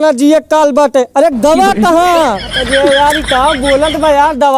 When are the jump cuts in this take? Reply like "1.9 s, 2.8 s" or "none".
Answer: 2.7 s